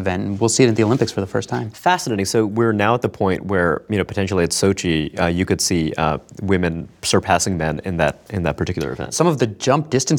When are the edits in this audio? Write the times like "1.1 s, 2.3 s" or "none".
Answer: 9.1 s